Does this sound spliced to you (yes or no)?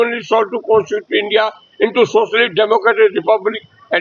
no